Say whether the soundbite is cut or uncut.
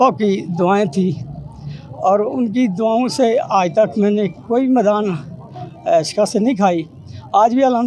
uncut